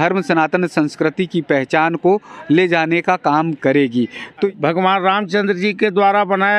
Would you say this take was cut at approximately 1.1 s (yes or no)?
no